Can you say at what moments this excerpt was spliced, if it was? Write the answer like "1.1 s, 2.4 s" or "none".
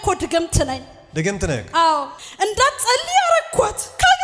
2.1 s